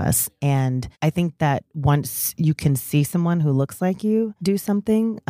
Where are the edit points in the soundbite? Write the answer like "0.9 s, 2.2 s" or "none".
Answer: 0.9 s, 4.4 s